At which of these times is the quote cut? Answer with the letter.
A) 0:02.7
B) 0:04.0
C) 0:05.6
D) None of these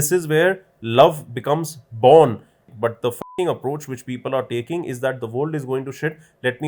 A